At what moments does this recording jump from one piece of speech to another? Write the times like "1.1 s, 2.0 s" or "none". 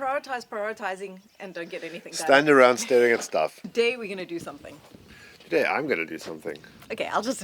3.6 s